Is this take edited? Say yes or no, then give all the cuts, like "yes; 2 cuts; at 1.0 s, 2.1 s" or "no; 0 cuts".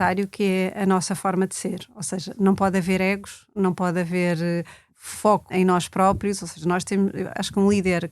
yes; 1 cut; at 5.2 s